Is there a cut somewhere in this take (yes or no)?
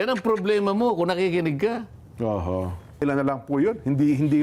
yes